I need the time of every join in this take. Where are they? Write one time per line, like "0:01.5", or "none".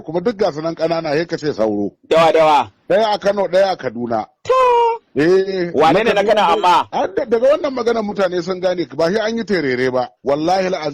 0:06.9
0:10.1